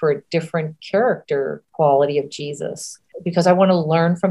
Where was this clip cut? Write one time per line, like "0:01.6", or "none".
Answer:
0:01.6
0:03.1

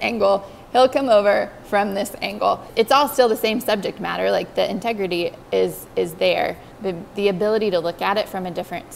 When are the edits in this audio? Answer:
0:02.7

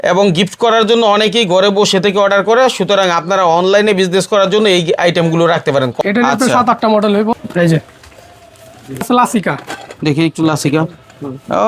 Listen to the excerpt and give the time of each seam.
0:05.9
0:07.3
0:09.0

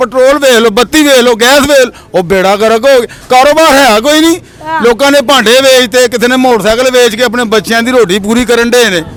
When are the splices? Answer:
none

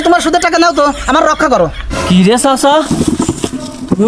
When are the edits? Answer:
none

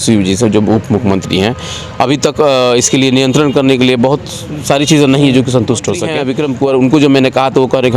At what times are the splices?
0:06.1

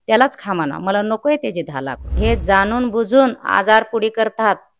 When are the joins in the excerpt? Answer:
0:02.1

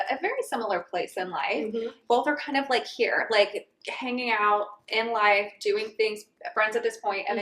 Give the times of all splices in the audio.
0:02.0

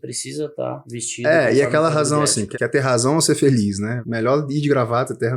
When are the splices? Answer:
0:00.9
0:02.4
0:04.0

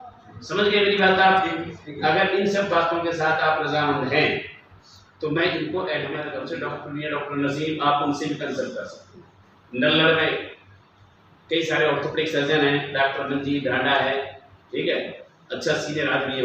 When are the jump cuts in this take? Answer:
0:06.4

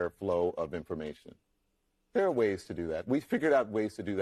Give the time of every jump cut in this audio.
none

